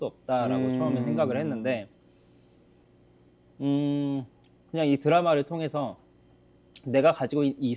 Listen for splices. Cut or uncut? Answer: uncut